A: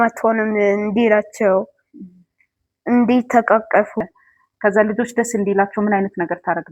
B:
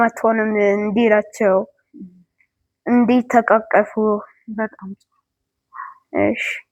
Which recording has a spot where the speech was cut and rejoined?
A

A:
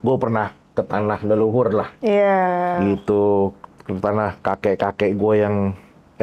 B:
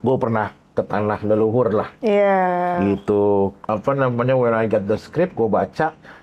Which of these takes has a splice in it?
B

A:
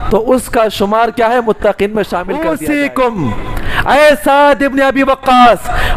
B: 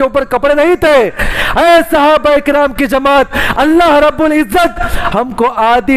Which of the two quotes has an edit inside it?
A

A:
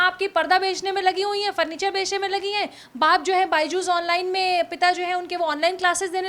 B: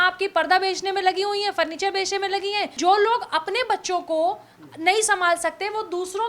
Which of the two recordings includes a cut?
B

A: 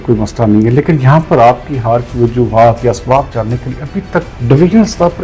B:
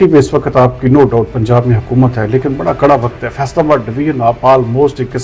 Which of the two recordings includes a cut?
A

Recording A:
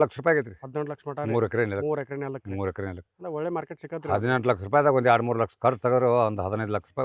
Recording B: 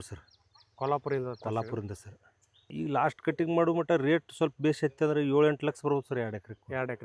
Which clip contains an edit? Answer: B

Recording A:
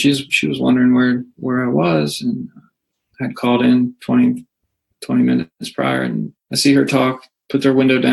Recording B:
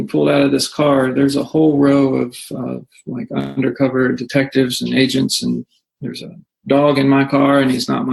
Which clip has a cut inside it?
A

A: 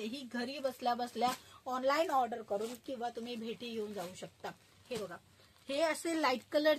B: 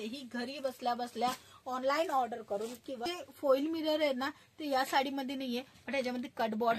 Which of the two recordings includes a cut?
B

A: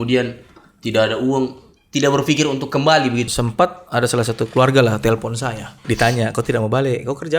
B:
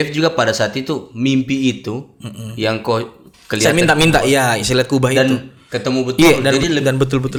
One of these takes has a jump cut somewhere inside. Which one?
A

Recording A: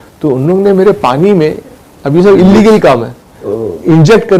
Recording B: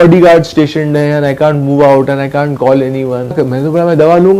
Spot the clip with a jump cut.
B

